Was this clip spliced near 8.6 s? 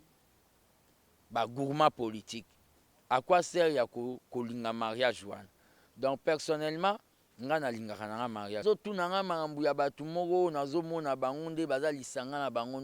yes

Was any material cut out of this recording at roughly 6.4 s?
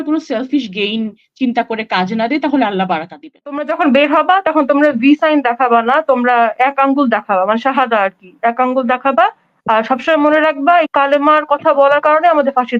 no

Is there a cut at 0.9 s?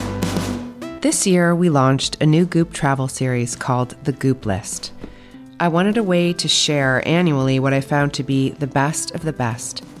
yes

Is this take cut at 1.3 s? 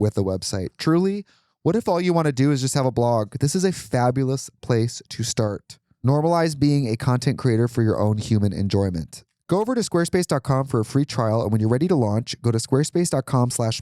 no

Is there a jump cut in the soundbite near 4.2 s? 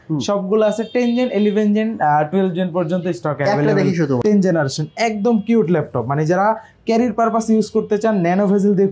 yes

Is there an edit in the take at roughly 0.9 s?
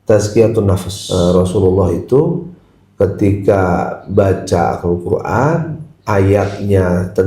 yes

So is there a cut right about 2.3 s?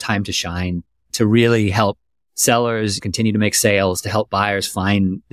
no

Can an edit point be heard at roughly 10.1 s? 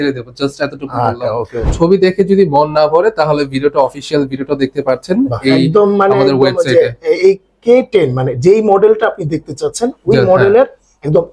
no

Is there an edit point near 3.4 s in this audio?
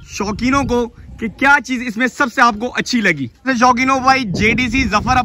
yes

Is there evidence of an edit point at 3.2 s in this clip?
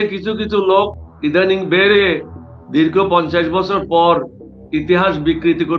no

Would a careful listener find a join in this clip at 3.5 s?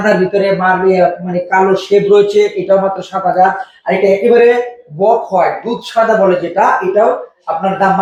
no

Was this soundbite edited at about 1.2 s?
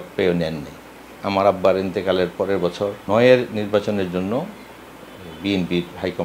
yes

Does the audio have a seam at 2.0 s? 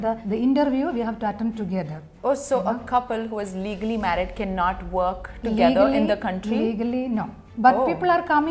yes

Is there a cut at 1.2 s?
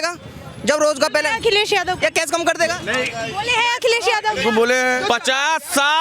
no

